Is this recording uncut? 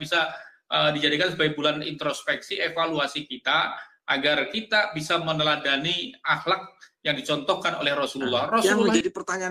no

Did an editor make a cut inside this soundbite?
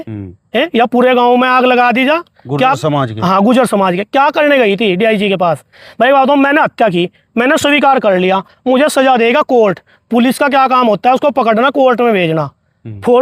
no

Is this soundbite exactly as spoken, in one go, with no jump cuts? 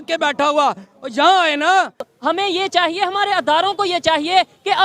yes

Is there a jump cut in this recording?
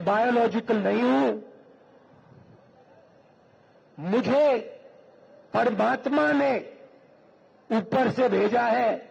no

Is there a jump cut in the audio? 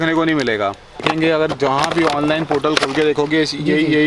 yes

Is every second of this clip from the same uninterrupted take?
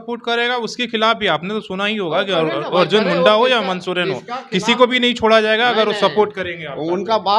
yes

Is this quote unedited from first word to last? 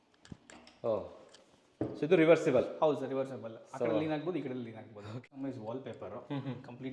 no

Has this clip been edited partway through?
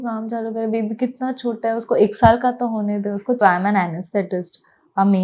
yes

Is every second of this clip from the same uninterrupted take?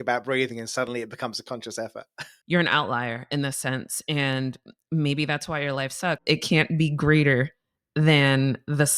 no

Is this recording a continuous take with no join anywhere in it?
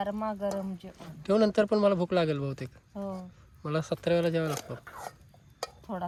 yes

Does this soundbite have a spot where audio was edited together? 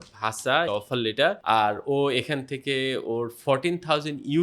yes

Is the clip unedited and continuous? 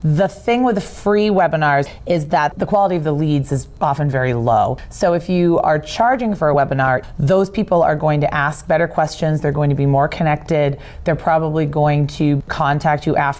no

